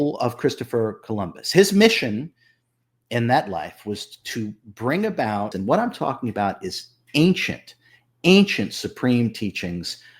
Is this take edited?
yes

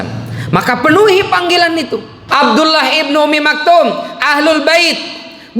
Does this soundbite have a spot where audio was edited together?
yes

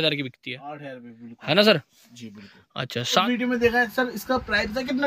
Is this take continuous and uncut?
no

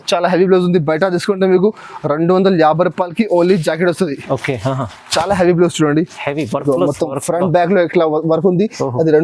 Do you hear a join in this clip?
no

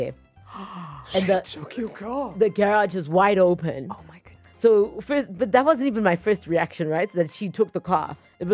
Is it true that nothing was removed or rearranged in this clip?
yes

